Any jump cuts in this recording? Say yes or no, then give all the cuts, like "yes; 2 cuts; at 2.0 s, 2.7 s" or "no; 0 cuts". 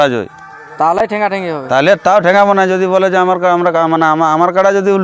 no; 0 cuts